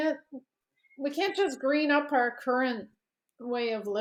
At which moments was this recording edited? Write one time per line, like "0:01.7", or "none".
none